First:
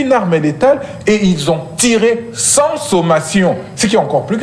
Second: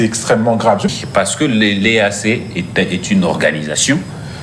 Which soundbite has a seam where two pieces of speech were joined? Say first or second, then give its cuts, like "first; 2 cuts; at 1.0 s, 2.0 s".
second; 1 cut; at 0.9 s